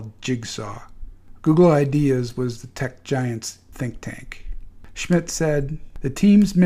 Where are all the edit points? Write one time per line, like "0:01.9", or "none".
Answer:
0:02.4

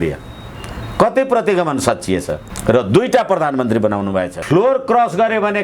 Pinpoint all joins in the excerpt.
0:04.4

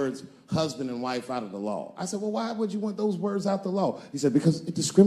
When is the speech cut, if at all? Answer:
none

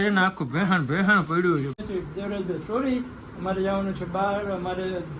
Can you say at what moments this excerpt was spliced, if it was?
0:01.8

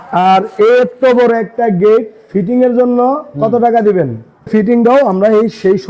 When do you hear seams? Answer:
0:04.5

